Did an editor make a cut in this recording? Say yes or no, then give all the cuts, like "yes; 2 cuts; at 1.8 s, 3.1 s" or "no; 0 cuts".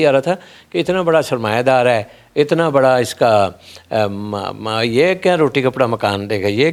no; 0 cuts